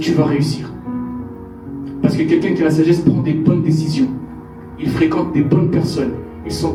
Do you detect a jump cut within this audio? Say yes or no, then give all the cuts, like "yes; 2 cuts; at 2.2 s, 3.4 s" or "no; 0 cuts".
no; 0 cuts